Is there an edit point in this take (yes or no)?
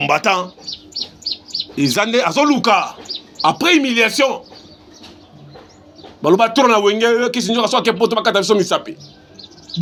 no